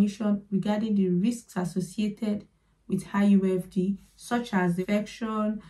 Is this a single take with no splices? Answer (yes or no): no